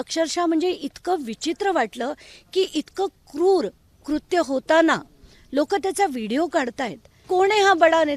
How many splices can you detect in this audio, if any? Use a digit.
1